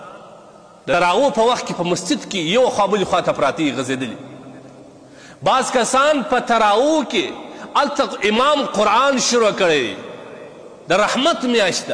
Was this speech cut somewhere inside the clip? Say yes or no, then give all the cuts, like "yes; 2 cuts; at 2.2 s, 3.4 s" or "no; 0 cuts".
yes; 1 cut; at 0.9 s